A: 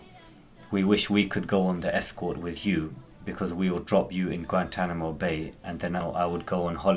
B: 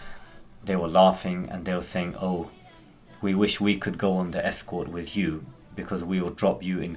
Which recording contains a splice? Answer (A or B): A